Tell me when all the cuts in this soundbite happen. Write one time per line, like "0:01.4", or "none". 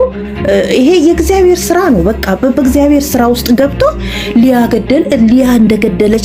none